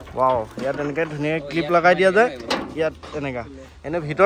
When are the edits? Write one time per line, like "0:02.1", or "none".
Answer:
none